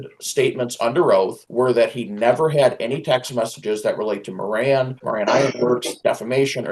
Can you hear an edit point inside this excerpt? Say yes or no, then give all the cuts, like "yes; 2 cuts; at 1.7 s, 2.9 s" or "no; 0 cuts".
yes; 3 cuts; at 1.4 s, 5.0 s, 5.9 s